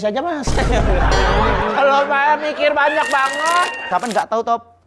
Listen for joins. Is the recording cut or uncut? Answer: cut